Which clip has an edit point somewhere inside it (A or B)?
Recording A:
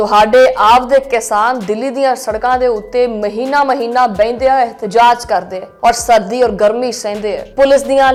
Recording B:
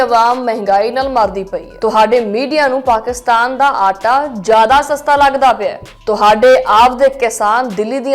B